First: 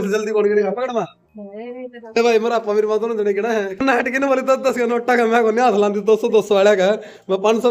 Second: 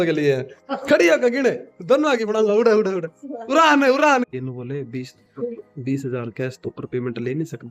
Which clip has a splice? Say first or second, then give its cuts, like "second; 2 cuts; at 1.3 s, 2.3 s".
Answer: second; 1 cut; at 4.3 s